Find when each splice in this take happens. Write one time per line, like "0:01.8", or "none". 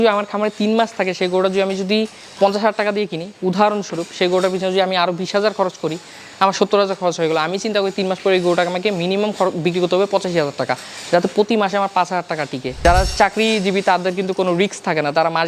0:12.8